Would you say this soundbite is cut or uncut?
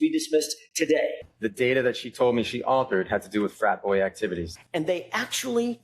cut